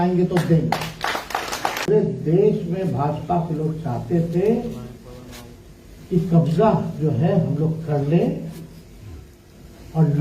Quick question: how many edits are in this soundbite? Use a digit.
1